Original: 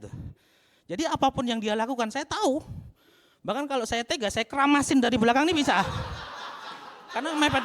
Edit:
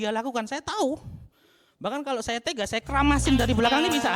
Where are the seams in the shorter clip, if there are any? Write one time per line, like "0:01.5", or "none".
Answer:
none